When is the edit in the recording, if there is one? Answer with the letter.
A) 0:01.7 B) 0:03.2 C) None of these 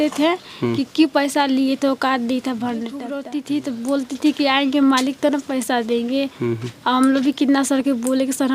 B